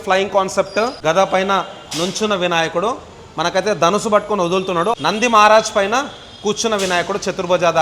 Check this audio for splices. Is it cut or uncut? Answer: cut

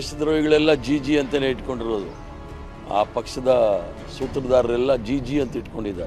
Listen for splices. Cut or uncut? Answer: uncut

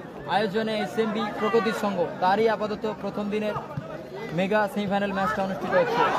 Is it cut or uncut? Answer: uncut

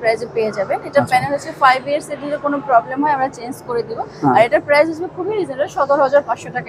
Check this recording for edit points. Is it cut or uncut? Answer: uncut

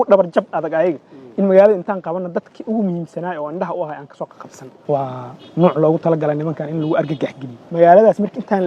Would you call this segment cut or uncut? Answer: cut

